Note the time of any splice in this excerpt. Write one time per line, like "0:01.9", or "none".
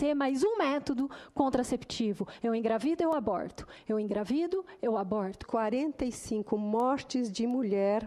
0:05.4